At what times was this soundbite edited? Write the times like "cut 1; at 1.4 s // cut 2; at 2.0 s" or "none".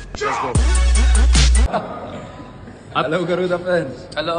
cut 1; at 1.7 s